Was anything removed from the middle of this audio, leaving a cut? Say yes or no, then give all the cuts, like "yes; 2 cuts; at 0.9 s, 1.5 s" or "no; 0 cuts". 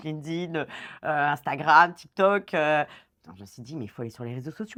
no; 0 cuts